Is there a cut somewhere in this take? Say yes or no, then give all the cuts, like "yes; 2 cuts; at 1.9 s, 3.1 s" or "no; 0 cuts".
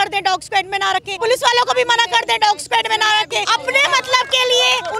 yes; 2 cuts; at 1.2 s, 3.4 s